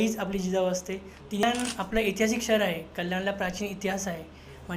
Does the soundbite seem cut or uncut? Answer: cut